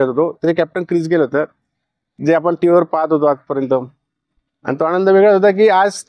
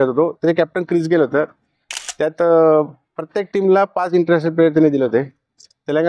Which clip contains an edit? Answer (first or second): first